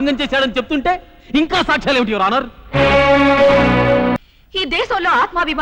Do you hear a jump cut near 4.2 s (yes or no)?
yes